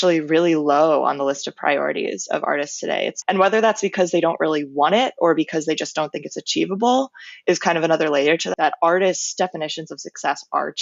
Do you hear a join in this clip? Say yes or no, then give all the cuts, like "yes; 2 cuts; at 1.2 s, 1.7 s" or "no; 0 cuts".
yes; 2 cuts; at 3.1 s, 8.5 s